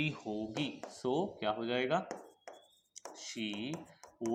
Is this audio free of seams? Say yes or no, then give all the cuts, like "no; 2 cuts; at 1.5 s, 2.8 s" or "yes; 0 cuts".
yes; 0 cuts